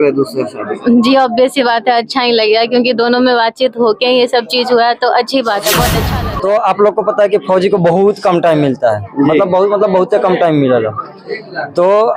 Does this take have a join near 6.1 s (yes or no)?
yes